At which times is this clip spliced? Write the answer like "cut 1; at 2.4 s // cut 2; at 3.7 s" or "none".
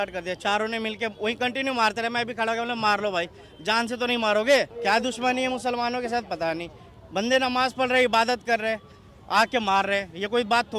cut 1; at 4.7 s